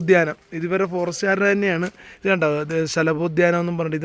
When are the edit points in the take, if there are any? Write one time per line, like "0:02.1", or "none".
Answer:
none